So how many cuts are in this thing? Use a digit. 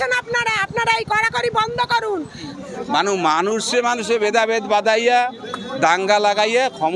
1